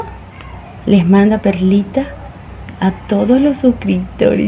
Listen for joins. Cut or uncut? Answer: uncut